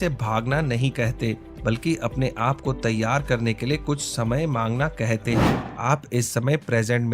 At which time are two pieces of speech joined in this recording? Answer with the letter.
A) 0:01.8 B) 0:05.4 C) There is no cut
B